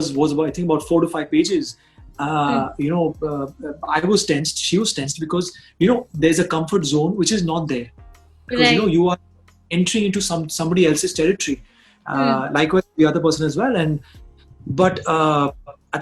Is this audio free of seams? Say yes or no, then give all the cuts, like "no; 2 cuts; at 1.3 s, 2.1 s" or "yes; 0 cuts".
yes; 0 cuts